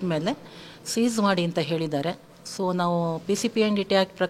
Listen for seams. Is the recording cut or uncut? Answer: uncut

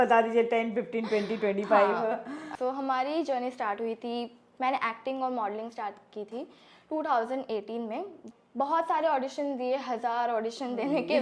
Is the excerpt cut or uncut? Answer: cut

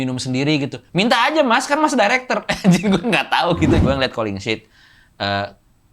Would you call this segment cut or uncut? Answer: cut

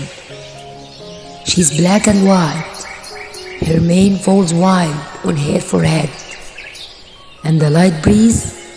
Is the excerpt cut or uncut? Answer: uncut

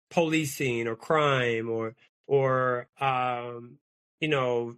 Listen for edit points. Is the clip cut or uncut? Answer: uncut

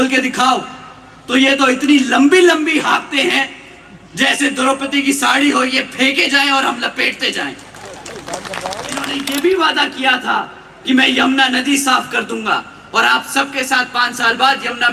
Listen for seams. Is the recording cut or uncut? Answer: cut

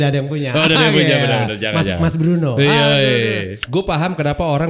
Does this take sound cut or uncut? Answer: cut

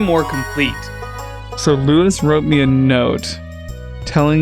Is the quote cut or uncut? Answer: cut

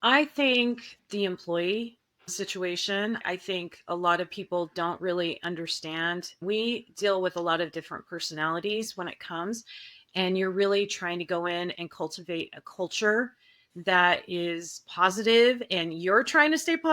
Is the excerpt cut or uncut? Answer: cut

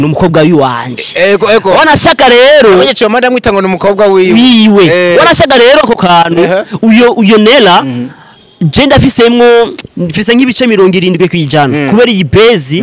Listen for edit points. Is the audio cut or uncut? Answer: uncut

